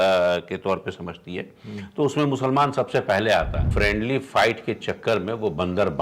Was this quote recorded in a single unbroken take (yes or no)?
no